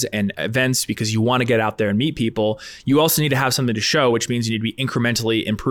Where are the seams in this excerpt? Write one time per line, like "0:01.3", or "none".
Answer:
none